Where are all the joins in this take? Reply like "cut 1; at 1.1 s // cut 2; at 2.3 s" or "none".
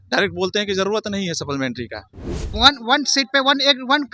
cut 1; at 2.5 s